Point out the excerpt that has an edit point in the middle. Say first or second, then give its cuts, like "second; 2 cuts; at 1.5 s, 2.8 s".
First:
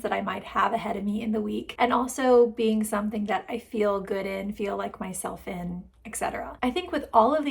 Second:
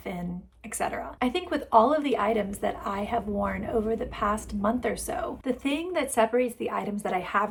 first; 1 cut; at 1.7 s